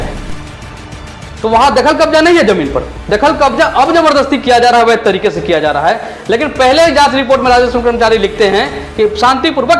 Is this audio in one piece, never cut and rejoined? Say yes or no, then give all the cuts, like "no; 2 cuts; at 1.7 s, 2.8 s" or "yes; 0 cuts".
yes; 0 cuts